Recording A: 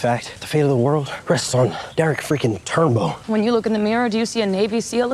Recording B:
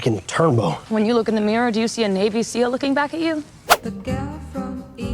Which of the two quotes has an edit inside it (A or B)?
B